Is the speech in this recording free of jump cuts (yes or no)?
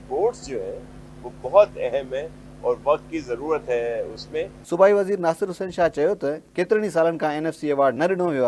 yes